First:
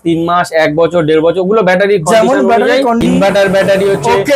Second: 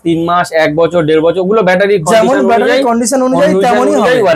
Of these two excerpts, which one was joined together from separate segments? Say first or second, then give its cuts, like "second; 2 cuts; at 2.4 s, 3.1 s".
first; 1 cut; at 3.0 s